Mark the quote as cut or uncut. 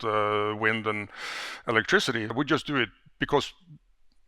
cut